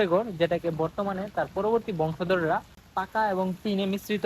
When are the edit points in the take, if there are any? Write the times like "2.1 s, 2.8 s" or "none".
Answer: 2.8 s